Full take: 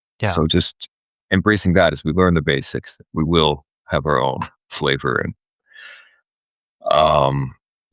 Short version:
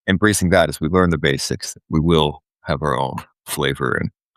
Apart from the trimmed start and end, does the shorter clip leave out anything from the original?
no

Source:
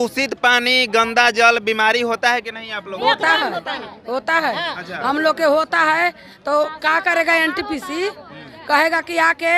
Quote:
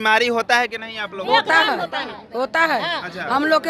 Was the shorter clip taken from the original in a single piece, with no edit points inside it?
yes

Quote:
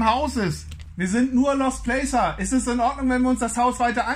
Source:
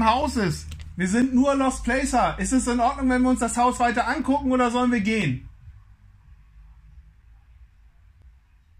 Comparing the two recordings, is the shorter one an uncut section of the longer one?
yes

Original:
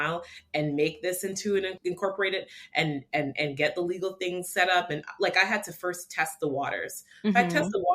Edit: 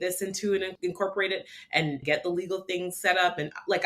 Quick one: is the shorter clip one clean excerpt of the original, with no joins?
no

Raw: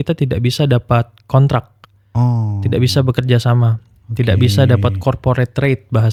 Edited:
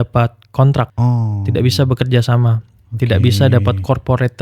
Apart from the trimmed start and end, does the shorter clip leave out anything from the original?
yes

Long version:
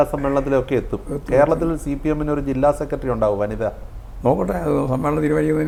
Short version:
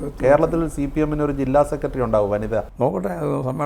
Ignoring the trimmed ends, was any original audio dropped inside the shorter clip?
yes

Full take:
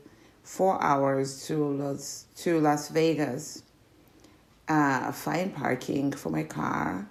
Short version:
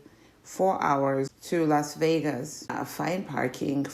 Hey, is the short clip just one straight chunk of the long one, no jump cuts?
no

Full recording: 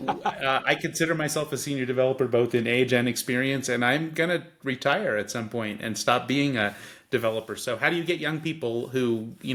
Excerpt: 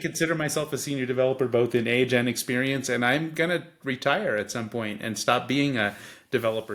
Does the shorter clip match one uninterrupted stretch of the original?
yes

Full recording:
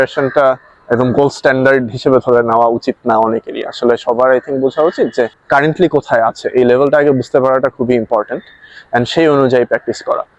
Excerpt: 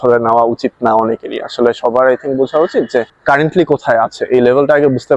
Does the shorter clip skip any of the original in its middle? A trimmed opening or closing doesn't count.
no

